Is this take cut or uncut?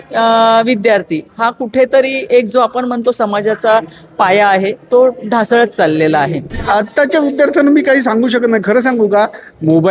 cut